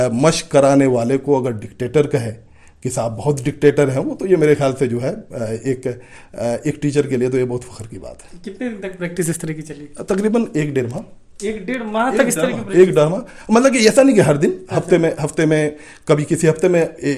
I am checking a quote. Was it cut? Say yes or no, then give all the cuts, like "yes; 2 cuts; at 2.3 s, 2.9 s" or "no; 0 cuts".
no; 0 cuts